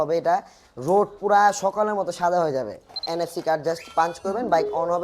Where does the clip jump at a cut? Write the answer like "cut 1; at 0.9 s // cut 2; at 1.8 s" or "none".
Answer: cut 1; at 3.0 s